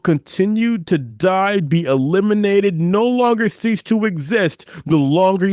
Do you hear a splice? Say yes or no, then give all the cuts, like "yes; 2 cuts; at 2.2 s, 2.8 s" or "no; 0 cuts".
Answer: no; 0 cuts